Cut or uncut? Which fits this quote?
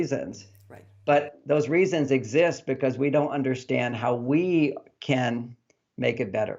uncut